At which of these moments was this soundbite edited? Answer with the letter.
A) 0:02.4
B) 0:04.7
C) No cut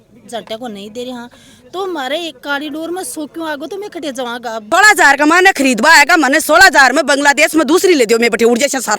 B